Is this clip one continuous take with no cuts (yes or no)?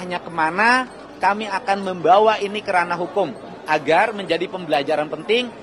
yes